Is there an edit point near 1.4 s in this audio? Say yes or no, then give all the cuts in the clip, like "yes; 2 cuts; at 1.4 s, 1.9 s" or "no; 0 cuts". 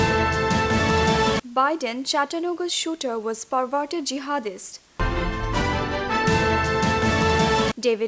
yes; 1 cut; at 1.4 s